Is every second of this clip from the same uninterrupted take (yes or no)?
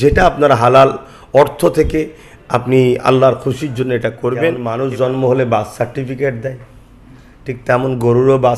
no